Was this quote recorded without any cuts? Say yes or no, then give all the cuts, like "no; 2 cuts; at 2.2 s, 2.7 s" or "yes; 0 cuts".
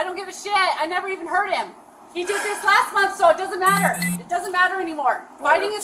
yes; 0 cuts